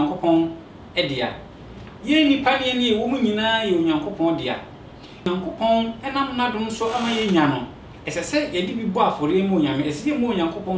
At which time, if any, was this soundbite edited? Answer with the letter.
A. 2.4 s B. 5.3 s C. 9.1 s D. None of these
B